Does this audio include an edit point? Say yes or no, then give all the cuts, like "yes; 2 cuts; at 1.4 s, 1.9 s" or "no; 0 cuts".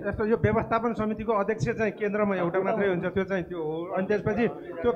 no; 0 cuts